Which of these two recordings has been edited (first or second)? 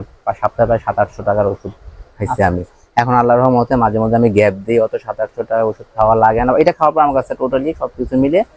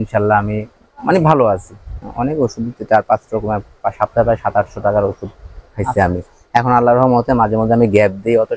second